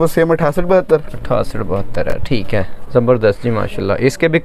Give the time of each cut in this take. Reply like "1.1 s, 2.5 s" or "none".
none